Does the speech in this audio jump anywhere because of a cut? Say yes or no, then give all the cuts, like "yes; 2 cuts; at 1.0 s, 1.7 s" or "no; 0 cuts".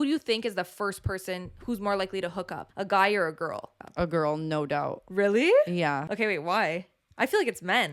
yes; 3 cuts; at 2.6 s, 3.7 s, 6.1 s